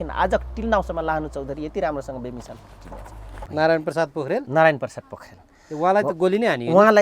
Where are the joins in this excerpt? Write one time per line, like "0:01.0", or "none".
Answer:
0:03.4

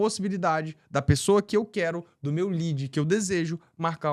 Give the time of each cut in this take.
none

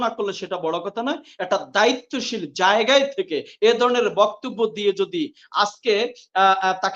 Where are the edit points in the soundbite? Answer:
none

